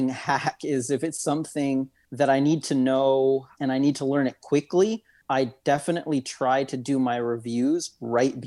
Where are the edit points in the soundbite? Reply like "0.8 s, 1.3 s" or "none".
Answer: 2.0 s, 3.5 s, 5.1 s